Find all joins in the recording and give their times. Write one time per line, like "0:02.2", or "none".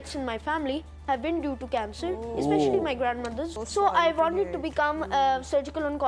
0:03.5